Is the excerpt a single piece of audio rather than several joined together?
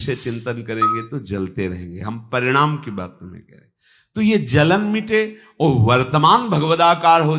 yes; 0 cuts

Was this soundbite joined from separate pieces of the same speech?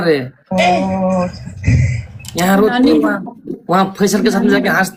no; 0 cuts

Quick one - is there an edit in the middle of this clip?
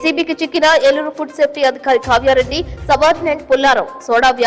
no; 0 cuts

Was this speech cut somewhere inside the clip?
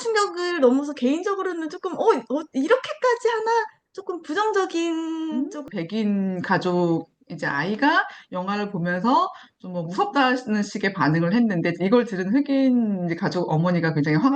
yes; 1 cut; at 5.6 s

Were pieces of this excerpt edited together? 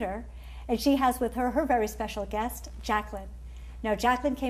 no; 0 cuts

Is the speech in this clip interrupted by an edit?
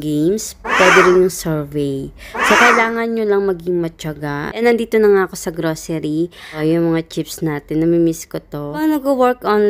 yes; 3 cuts; at 4.6 s, 6.6 s, 8.8 s

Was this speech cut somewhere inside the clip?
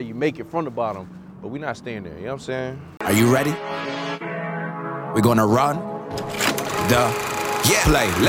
yes; 1 cut; at 2.8 s

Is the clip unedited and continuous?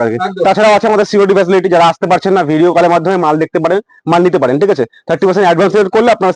yes; 0 cuts

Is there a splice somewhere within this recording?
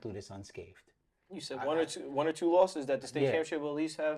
no; 0 cuts

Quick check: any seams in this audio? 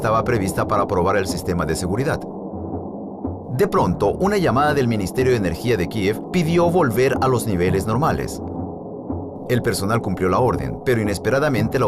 yes; 1 cut; at 3.8 s

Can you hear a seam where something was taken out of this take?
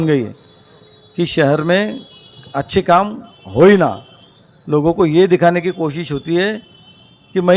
no; 0 cuts

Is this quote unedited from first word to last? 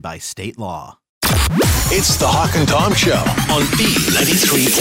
no; 1 cut; at 1.2 s

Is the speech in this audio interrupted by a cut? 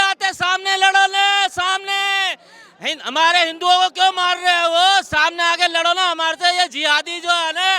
no; 0 cuts

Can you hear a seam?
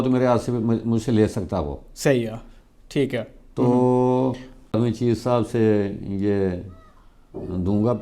yes; 1 cut; at 4.8 s

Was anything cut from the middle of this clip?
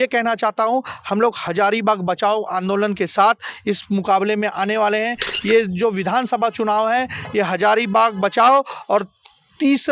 no; 0 cuts

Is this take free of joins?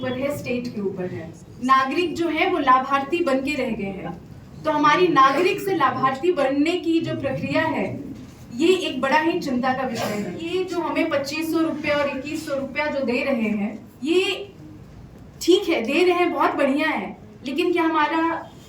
no; 3 cuts; at 1.5 s, 10.5 s, 13.9 s

